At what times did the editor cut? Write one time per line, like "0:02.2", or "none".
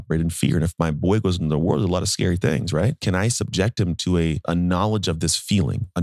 0:03.0
0:04.4

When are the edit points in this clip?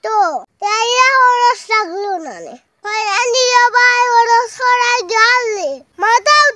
0:02.7

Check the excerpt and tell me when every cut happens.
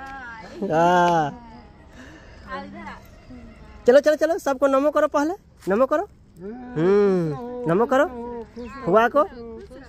none

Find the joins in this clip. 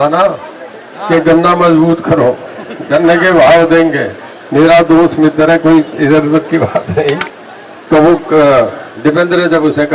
0:07.4

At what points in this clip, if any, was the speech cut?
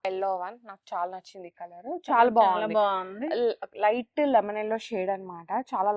none

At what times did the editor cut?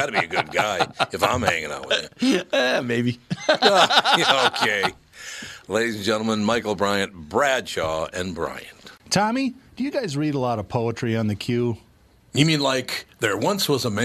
0:08.9

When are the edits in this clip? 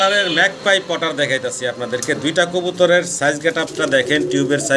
none

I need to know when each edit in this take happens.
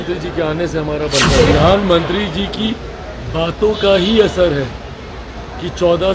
0:01.5

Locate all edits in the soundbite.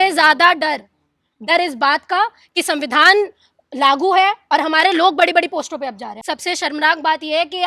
0:06.2

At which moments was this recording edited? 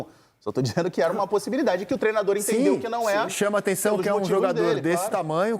none

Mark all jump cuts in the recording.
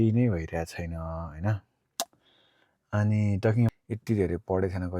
0:03.7

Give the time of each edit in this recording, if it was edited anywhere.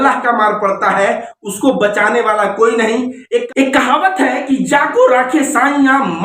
0:03.5

